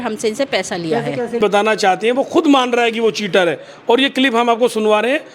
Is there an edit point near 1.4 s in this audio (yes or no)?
yes